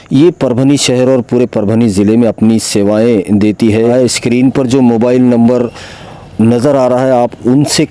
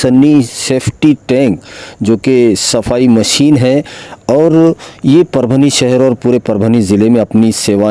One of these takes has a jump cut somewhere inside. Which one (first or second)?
first